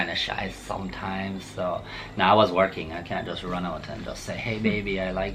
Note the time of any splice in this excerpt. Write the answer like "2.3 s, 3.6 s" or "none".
none